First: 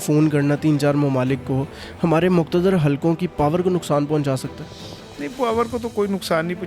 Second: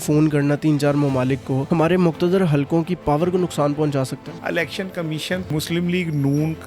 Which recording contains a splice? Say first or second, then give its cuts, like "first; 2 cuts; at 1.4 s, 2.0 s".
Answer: second; 3 cuts; at 1.6 s, 4.3 s, 5.5 s